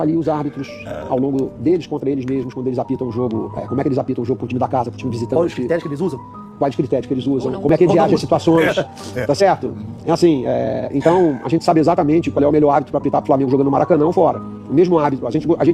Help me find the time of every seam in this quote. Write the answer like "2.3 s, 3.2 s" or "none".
none

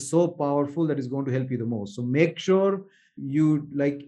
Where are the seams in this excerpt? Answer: 3.2 s

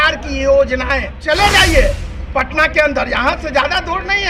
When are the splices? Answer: 1.1 s

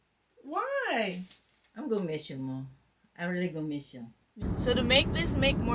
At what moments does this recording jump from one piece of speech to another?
4.4 s

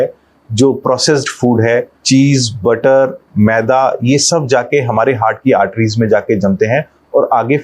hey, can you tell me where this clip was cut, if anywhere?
1.9 s

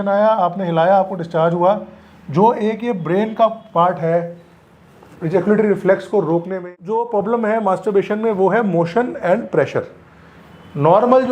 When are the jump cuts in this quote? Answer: 6.6 s

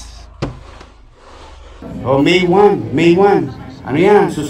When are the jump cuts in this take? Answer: 1.9 s

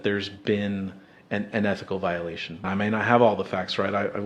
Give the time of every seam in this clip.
2.6 s

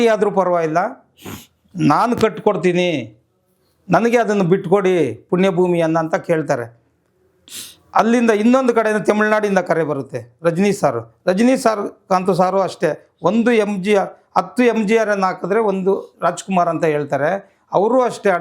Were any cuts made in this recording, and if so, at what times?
none

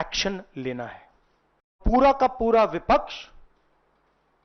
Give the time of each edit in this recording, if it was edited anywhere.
1.8 s

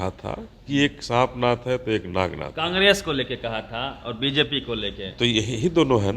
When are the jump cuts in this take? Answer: none

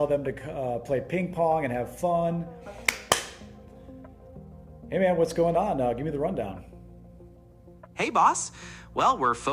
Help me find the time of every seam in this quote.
2.9 s

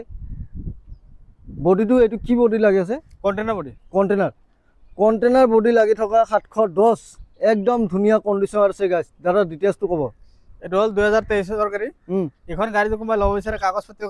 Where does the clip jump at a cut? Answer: none

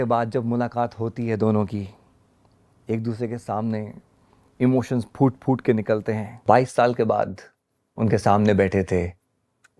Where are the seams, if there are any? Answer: 6.4 s

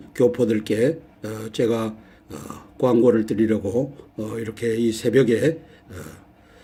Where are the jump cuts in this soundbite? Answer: none

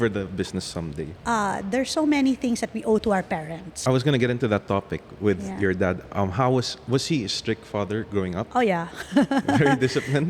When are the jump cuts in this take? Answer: 1.1 s, 3.6 s

